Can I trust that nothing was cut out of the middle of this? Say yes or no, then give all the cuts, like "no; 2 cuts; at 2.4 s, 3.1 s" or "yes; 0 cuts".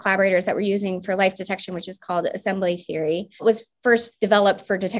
no; 1 cut; at 3.4 s